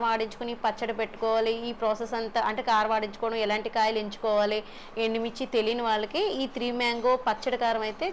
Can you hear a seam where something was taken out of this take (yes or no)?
no